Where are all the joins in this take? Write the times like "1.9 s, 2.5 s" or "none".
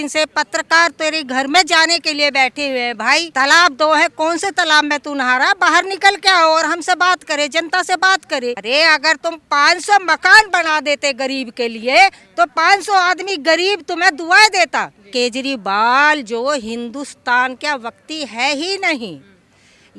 3.3 s, 8.6 s, 15.1 s